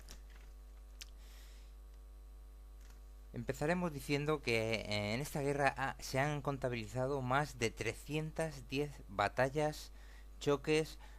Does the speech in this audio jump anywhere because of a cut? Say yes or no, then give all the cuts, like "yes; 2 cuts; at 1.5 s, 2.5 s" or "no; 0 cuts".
yes; 1 cut; at 9.5 s